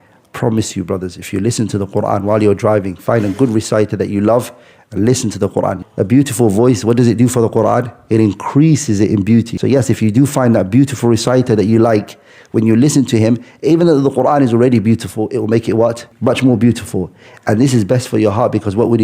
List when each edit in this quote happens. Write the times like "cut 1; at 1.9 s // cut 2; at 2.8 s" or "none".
cut 1; at 5.8 s // cut 2; at 9.5 s